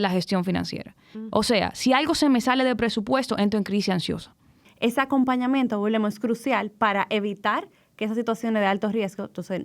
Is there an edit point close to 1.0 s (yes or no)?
no